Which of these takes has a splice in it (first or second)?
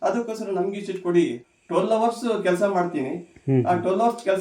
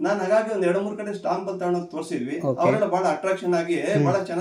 first